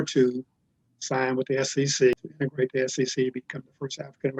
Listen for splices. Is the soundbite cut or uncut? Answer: cut